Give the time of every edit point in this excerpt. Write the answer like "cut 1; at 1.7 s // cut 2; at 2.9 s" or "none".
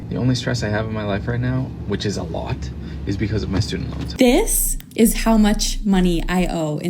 cut 1; at 4.1 s